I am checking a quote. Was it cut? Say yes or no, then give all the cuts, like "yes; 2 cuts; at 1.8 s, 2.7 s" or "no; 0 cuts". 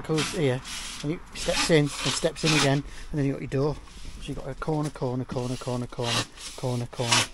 no; 0 cuts